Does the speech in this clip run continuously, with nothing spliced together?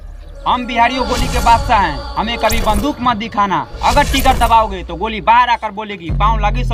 yes; 0 cuts

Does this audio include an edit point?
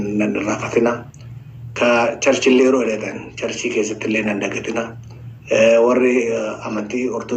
no; 0 cuts

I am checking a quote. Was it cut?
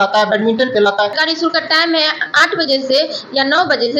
yes; 1 cut; at 1.2 s

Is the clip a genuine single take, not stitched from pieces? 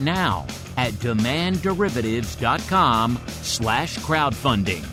yes; 0 cuts

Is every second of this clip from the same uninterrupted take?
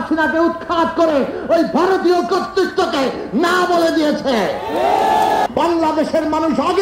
no; 1 cut; at 5.5 s

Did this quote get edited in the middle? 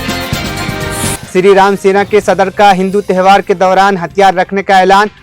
yes; 1 cut; at 1.2 s

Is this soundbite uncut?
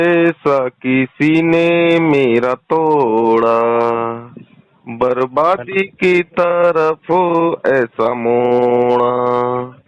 yes; 0 cuts

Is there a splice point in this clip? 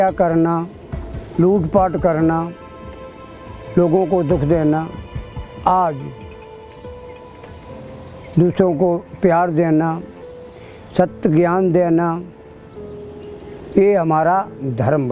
no; 0 cuts

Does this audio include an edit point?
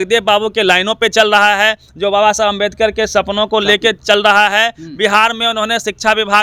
no; 0 cuts

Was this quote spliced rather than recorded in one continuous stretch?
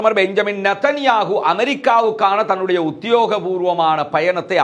no; 0 cuts

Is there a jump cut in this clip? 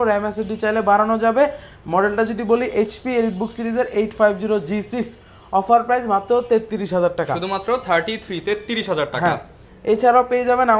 no; 0 cuts

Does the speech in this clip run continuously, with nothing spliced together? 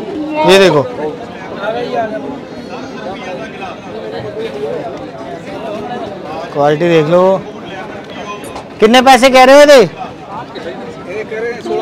yes; 0 cuts

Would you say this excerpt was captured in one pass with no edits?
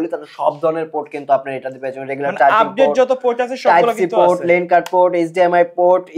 yes; 0 cuts

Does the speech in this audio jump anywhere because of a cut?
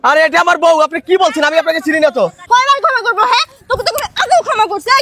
yes; 1 cut; at 2.4 s

